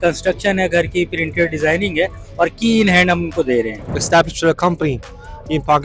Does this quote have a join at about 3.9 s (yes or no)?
yes